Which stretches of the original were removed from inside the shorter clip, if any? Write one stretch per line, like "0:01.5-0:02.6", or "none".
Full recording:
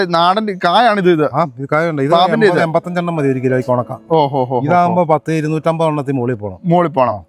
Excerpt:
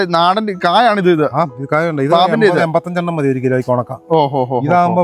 none